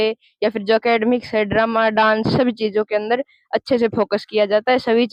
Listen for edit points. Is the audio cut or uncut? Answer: uncut